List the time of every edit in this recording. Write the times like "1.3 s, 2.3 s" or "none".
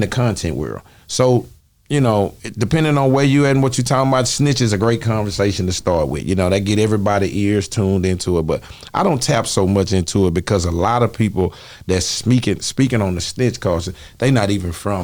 none